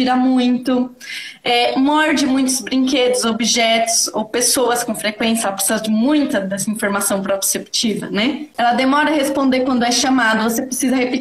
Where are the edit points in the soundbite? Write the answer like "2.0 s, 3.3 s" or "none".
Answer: 8.5 s